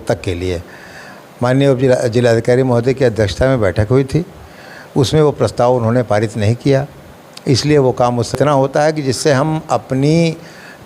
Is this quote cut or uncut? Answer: cut